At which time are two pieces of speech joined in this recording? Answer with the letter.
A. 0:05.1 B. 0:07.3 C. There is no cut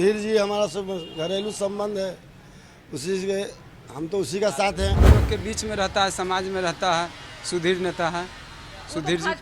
A